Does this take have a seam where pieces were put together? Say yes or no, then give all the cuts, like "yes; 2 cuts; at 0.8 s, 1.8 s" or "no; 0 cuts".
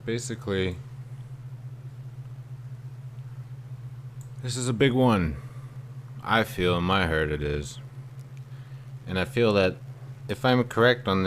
yes; 1 cut; at 3.4 s